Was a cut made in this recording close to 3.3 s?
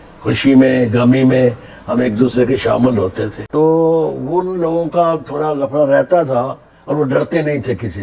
yes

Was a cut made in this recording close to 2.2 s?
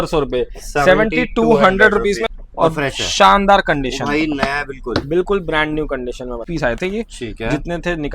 yes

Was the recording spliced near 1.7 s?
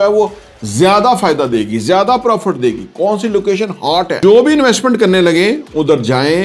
no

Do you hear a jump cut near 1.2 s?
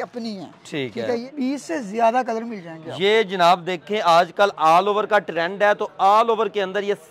yes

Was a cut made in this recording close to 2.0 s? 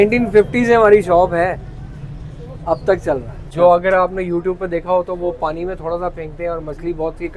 no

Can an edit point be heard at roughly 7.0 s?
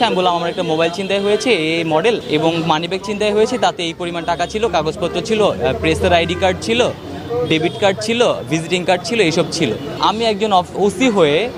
no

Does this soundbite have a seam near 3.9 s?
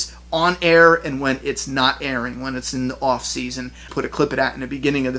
yes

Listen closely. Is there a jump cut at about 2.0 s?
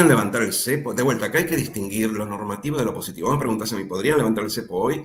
no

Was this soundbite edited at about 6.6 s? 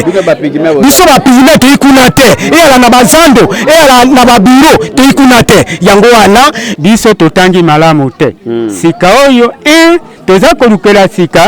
yes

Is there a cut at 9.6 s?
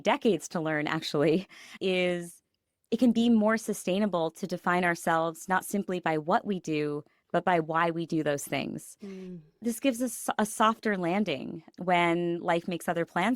yes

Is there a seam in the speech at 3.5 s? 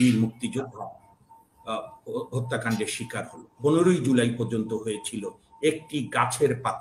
yes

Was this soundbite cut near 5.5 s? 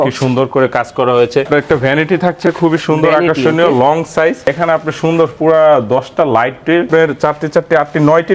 no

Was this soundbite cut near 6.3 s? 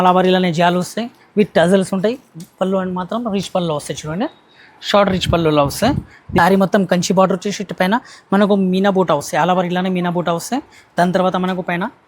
yes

